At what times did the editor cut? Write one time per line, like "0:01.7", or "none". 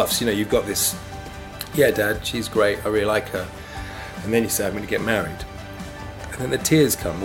none